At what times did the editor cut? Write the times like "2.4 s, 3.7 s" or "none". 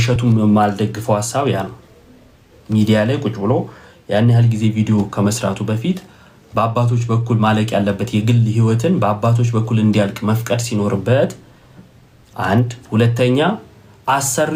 none